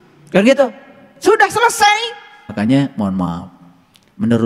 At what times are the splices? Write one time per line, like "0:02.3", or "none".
0:02.4

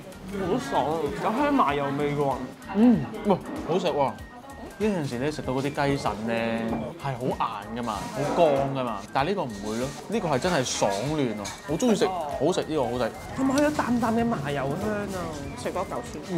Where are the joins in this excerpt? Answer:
none

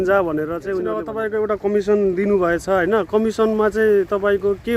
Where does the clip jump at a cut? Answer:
0:01.1

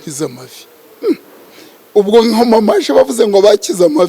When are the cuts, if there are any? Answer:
none

